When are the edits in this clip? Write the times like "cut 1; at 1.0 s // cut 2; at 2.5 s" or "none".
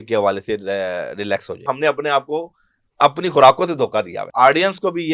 cut 1; at 1.7 s // cut 2; at 4.2 s